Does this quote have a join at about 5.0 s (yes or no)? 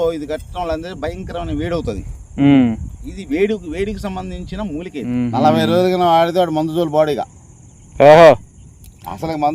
yes